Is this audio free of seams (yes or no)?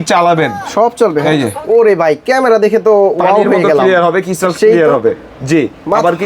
no